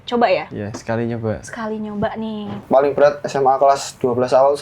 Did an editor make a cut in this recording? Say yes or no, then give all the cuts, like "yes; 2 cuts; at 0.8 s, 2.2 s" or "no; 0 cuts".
yes; 1 cut; at 2.5 s